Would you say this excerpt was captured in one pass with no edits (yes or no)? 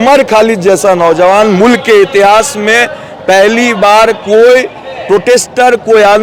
yes